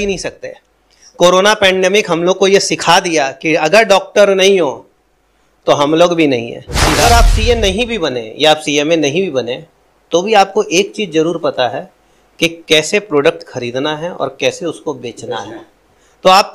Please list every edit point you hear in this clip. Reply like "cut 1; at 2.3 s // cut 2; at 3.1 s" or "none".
cut 1; at 7.0 s